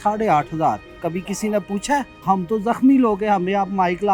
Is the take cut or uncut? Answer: uncut